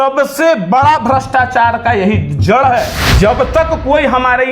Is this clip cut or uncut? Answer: cut